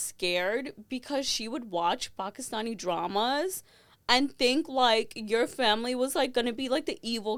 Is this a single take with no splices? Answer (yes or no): yes